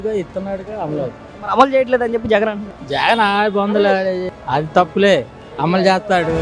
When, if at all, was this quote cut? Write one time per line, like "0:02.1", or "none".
0:04.3
0:05.4